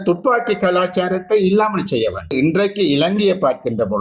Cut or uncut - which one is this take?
cut